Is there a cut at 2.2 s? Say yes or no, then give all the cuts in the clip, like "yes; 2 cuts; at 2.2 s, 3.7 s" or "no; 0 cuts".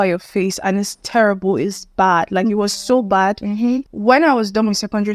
no; 1 cut; at 3.9 s